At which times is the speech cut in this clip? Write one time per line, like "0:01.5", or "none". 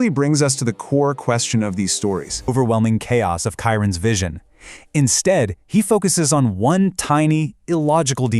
0:02.5